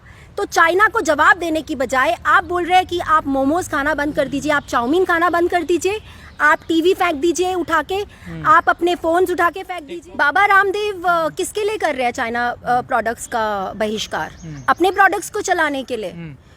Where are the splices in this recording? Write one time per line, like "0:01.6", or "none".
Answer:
0:09.7